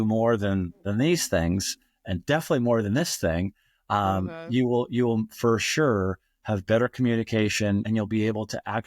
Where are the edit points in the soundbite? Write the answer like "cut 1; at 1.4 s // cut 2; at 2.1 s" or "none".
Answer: cut 1; at 7.8 s